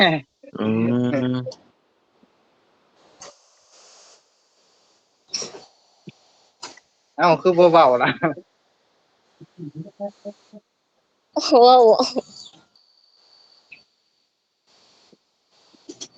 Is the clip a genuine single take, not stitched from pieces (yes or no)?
yes